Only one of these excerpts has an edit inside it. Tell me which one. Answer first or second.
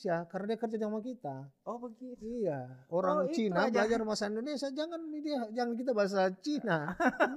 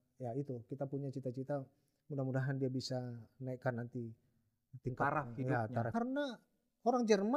second